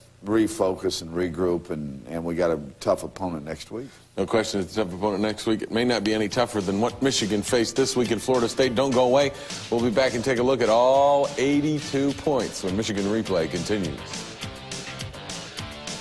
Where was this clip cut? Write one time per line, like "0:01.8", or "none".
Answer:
none